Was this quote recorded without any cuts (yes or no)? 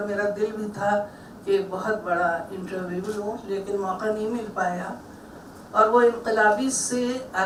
yes